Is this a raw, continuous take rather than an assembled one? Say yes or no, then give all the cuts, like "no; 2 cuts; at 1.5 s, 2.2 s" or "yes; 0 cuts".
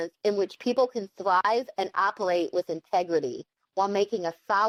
yes; 0 cuts